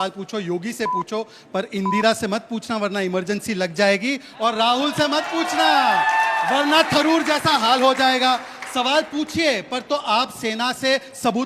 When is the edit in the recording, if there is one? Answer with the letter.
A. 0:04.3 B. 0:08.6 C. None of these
B